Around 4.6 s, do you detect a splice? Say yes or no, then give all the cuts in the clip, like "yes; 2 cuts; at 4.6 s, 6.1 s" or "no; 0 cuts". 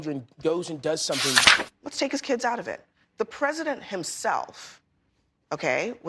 no; 1 cut; at 1.5 s